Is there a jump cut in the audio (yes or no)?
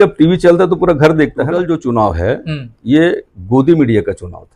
yes